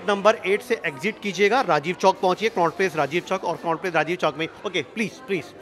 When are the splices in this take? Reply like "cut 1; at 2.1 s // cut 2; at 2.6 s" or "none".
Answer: none